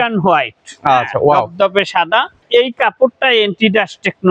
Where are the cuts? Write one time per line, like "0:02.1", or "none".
0:02.4